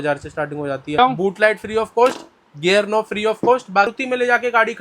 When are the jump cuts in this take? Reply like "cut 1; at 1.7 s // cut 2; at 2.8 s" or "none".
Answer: cut 1; at 1.0 s // cut 2; at 3.9 s